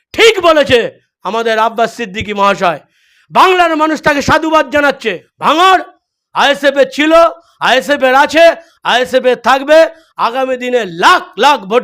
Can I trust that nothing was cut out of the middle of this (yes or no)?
no